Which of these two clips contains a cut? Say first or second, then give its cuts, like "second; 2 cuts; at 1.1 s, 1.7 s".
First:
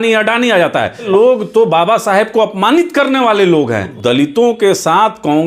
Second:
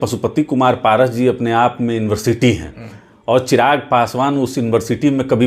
first; 2 cuts; at 1.1 s, 3.9 s